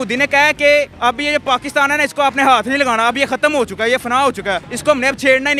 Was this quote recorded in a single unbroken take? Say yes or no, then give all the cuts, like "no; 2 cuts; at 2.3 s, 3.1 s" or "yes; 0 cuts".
no; 2 cuts; at 0.9 s, 4.7 s